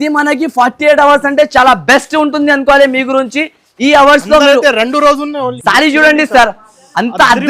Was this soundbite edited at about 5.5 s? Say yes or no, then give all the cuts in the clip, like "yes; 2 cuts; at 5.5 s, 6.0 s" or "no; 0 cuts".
yes; 1 cut; at 5.5 s